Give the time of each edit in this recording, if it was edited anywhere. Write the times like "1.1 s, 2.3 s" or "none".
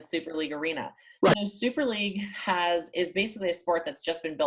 1.3 s